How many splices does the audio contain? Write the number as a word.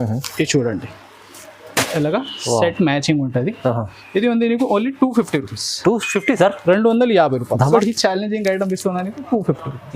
one